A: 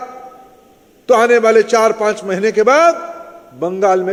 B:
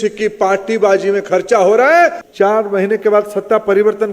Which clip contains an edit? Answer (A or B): B